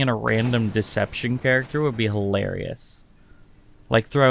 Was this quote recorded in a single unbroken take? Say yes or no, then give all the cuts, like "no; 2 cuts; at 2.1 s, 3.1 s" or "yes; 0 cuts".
yes; 0 cuts